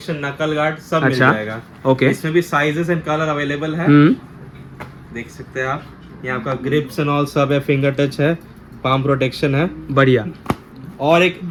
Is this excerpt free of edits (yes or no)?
yes